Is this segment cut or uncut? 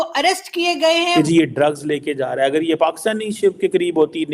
cut